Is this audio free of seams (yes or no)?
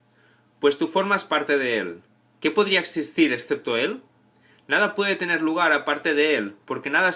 no